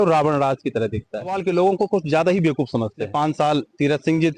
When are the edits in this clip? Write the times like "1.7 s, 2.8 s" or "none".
1.4 s, 3.0 s